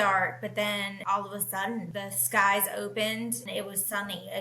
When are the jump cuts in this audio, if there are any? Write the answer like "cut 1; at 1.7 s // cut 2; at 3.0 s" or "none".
cut 1; at 3.5 s